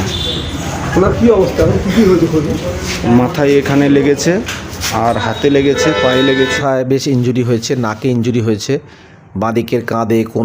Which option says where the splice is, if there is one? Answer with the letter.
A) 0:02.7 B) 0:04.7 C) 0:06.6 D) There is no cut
C